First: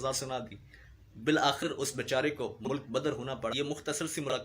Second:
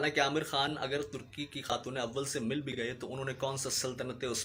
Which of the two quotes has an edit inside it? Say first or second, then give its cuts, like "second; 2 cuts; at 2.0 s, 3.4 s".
first; 1 cut; at 3.5 s